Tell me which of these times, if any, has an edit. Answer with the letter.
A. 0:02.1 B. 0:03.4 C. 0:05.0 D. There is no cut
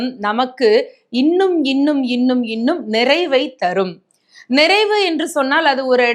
D